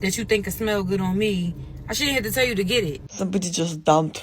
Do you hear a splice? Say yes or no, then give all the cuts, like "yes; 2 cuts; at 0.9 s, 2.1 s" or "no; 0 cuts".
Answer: yes; 1 cut; at 3.0 s